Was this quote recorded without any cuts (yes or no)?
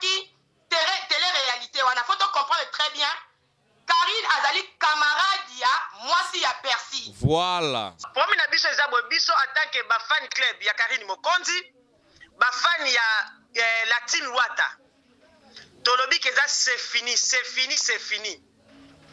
no